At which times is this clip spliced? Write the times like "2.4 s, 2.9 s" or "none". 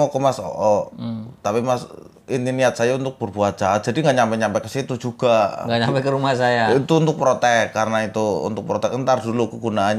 none